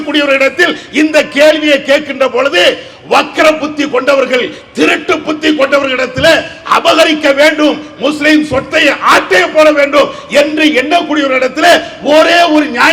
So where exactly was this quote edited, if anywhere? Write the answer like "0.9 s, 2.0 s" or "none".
none